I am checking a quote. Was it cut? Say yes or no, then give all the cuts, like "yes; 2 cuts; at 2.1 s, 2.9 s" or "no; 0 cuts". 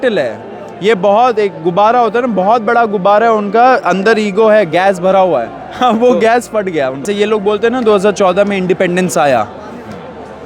yes; 1 cut; at 7.0 s